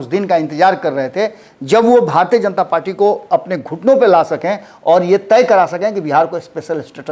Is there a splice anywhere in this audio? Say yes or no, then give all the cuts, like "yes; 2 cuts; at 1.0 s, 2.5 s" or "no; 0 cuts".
no; 0 cuts